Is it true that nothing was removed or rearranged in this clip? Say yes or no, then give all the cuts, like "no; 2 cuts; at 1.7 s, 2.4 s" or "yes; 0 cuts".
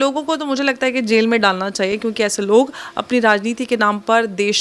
yes; 0 cuts